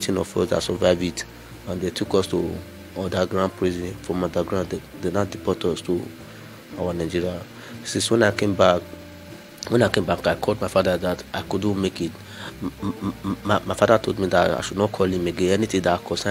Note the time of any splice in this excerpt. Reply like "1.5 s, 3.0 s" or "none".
none